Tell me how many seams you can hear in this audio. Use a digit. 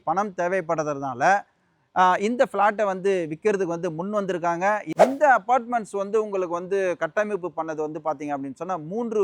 1